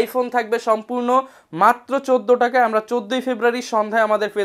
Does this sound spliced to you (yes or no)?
no